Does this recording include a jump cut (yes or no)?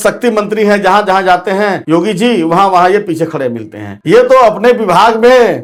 no